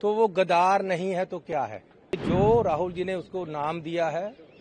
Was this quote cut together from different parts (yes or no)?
yes